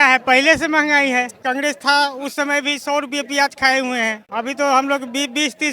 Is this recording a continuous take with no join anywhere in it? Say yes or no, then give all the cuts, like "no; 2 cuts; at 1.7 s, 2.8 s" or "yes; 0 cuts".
no; 1 cut; at 1.4 s